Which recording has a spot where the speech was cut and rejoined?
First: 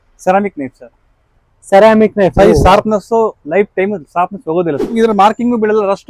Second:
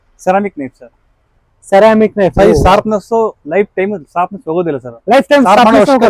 first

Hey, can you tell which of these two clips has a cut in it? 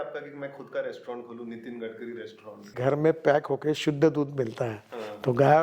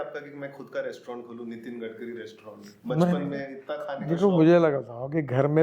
first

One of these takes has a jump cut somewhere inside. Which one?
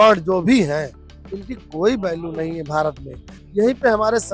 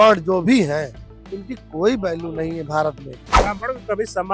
second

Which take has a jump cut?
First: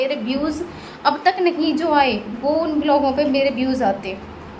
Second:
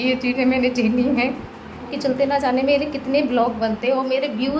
second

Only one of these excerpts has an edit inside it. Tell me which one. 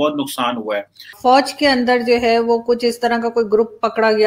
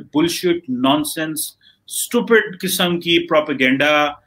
first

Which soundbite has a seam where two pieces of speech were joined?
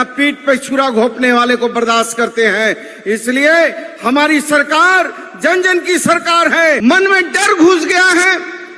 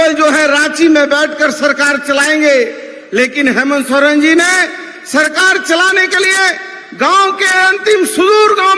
first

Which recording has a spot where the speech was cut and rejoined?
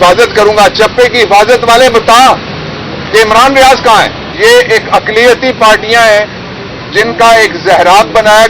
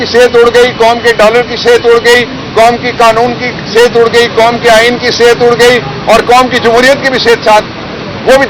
first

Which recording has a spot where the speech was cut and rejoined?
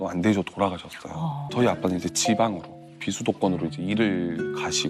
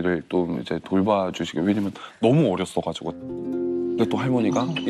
first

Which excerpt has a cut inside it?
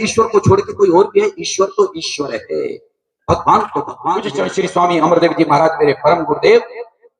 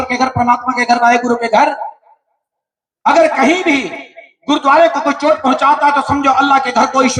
first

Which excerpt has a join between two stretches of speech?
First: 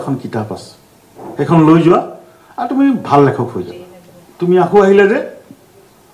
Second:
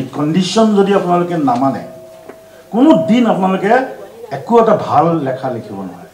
first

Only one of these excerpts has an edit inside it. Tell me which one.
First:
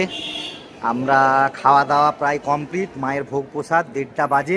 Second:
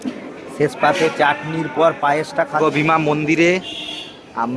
second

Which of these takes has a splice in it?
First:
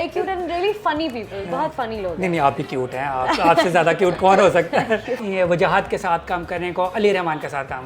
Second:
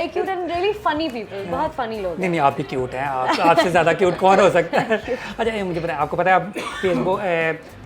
first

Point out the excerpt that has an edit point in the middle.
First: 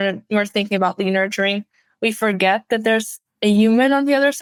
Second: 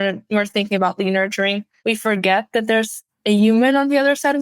second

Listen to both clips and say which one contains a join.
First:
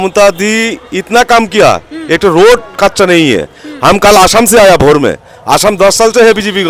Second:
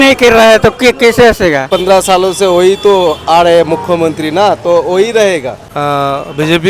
second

